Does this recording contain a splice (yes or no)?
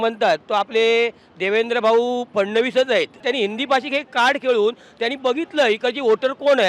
yes